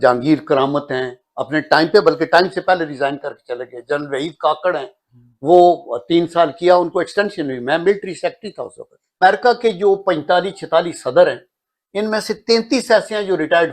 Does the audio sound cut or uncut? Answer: cut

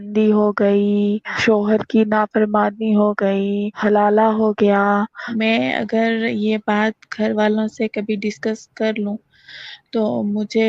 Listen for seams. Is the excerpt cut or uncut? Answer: cut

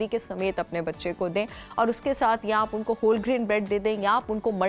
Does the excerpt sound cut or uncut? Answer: uncut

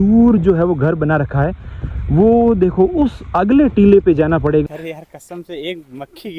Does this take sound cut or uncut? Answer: cut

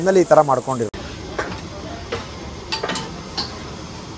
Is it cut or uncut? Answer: uncut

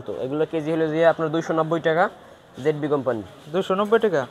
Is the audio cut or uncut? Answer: uncut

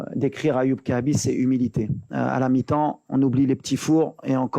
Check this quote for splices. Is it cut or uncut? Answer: cut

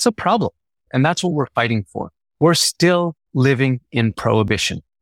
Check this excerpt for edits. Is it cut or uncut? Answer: cut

